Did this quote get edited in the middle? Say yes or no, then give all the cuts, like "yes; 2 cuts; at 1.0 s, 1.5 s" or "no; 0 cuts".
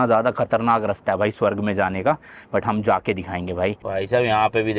yes; 1 cut; at 3.8 s